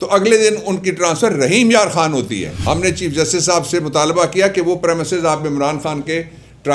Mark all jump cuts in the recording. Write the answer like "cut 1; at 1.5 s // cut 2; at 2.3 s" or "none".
cut 1; at 2.5 s